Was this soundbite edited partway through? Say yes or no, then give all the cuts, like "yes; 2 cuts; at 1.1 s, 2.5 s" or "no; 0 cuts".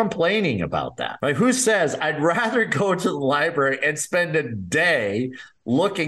yes; 1 cut; at 1.1 s